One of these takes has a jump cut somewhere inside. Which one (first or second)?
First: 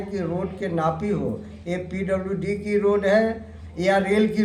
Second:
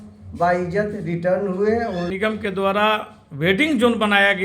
second